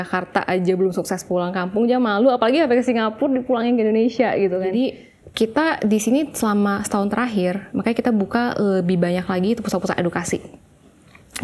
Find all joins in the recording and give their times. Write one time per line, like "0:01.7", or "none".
0:04.7